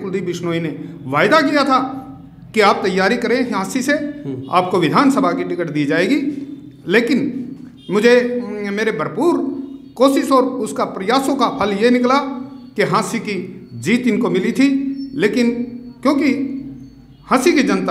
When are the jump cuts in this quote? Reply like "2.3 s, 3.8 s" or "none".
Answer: none